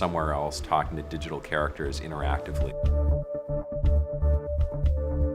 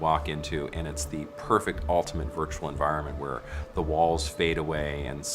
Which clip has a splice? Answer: second; 1 cut; at 2.6 s

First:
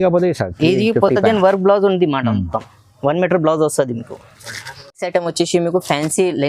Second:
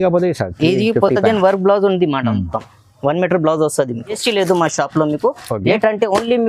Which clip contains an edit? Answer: second; 1 cut; at 4.2 s

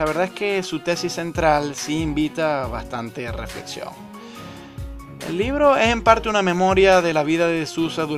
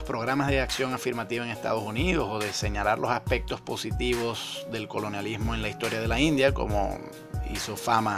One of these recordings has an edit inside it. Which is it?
first; 1 cut; at 5.0 s

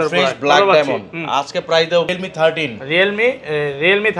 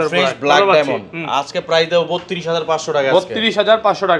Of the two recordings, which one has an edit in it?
first; 1 cut; at 2.1 s

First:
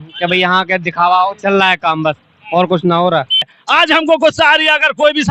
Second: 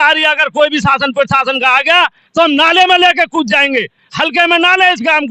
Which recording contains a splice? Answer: first; 1 cut; at 3.5 s

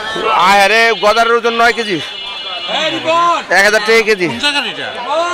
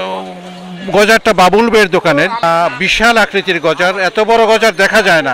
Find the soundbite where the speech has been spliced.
second; 1 cut; at 2.4 s

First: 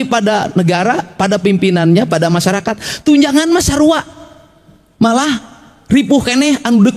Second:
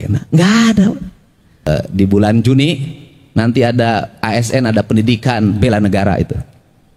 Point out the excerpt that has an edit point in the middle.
second; 1 cut; at 1.7 s

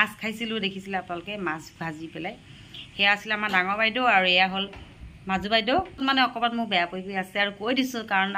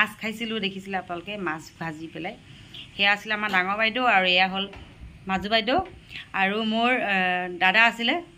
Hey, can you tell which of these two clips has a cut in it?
first; 1 cut; at 6.0 s

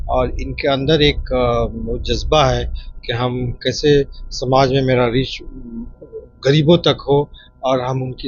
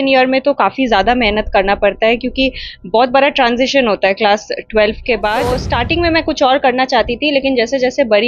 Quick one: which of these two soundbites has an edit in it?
second; 1 cut; at 5.6 s

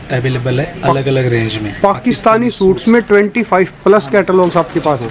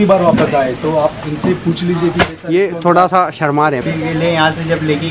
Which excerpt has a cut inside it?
second; 1 cut; at 3.8 s

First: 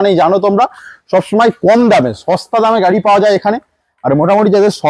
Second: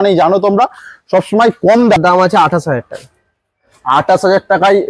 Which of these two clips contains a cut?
second; 1 cut; at 2.0 s

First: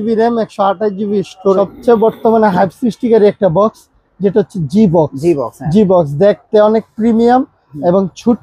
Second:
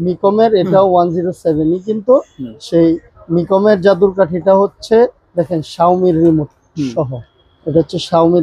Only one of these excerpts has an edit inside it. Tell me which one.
first; 1 cut; at 1.6 s

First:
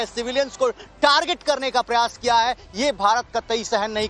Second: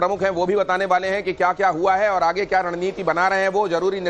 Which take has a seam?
second; 1 cut; at 1.9 s

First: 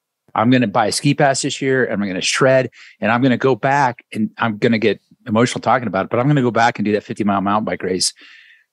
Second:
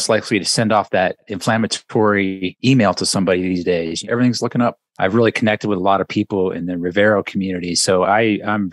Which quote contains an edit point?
second; 4 cuts; at 1.3 s, 2.5 s, 4.0 s, 4.9 s

